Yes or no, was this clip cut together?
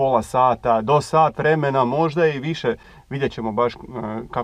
no